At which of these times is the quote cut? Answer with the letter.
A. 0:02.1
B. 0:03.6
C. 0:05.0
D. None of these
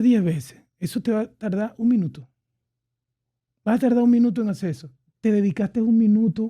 D